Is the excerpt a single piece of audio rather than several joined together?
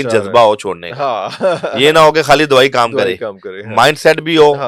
yes; 0 cuts

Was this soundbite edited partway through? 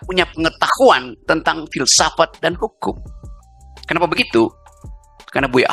no; 0 cuts

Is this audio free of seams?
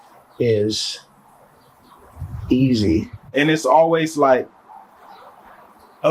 no; 1 cut; at 3.2 s

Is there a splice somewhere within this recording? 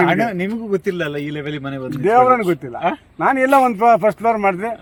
no; 0 cuts

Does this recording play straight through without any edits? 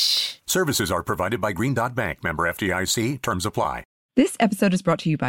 no; 1 cut; at 3.9 s

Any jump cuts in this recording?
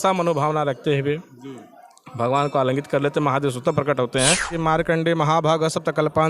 yes; 1 cut; at 4.5 s

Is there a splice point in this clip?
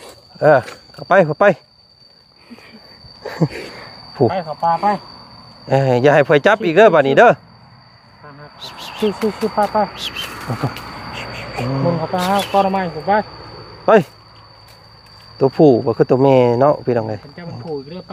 no; 0 cuts

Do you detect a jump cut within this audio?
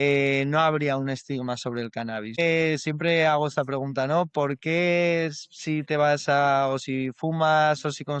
yes; 1 cut; at 2.4 s

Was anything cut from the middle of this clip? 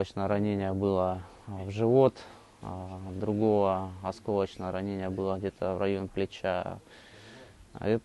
no; 0 cuts

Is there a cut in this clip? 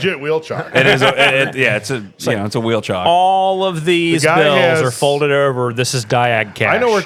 no; 0 cuts

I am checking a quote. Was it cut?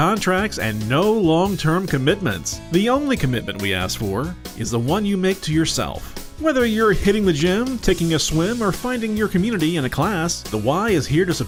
no; 0 cuts

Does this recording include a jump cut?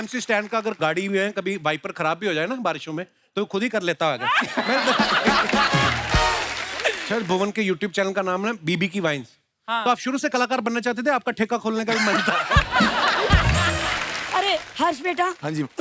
yes; 2 cuts; at 7.0 s, 14.1 s

